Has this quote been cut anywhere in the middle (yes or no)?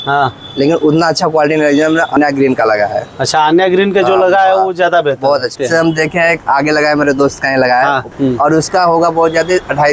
yes